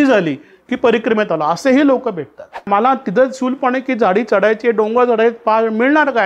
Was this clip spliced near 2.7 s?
yes; 1 cut; at 2.7 s

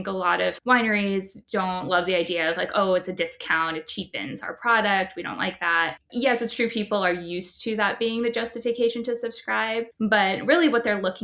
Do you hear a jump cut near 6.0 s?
yes; 2 cuts; at 1.4 s, 6.0 s

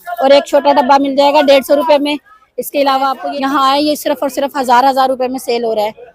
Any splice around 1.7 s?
no; 1 cut; at 3.2 s

